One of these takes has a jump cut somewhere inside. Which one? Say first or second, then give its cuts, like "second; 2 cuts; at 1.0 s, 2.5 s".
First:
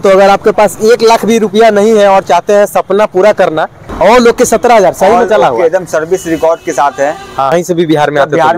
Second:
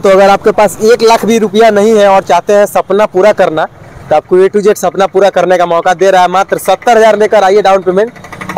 first; 2 cuts; at 3.8 s, 7.5 s